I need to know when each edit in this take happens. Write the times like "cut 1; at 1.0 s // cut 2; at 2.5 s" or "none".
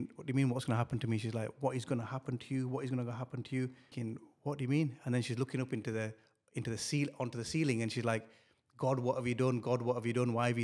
cut 1; at 3.8 s